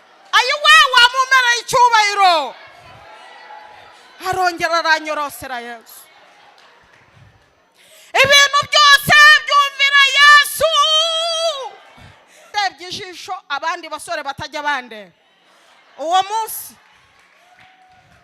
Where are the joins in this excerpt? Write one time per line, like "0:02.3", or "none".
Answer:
0:12.5